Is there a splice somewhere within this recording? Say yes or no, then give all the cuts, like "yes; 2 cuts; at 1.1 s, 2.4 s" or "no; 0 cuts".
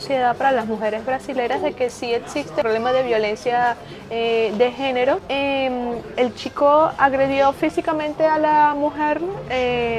yes; 2 cuts; at 2.6 s, 5.2 s